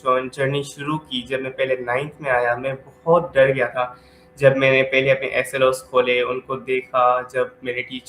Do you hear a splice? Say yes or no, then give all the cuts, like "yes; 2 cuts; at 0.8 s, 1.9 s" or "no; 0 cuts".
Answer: no; 0 cuts